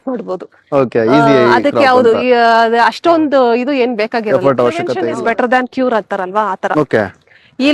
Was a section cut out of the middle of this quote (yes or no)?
yes